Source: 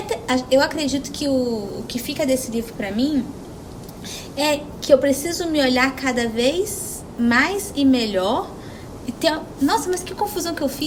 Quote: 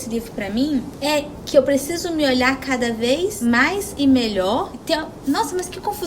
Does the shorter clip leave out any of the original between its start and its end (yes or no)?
yes